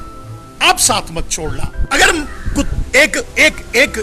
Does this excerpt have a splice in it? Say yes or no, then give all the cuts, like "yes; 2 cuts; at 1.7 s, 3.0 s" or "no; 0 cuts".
yes; 1 cut; at 1.7 s